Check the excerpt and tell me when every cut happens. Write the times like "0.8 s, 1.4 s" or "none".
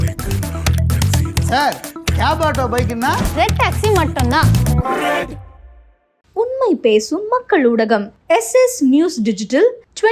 none